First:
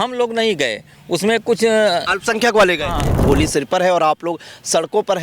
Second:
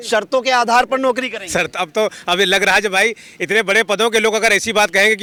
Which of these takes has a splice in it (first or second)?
first